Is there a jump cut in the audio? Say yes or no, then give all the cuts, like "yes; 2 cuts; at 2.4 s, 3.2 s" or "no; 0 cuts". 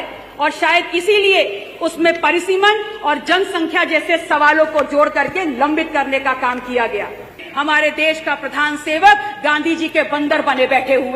yes; 1 cut; at 7.4 s